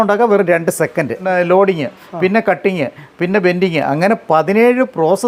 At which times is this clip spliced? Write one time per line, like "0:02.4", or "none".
0:01.3